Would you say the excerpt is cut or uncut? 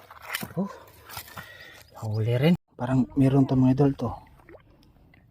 cut